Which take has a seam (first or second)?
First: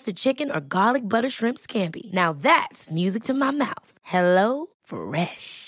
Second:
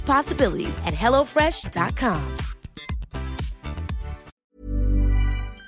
second